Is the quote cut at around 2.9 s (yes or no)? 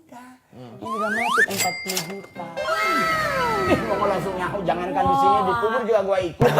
no